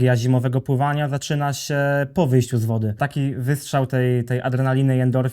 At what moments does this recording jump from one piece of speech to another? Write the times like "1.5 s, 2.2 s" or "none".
3.0 s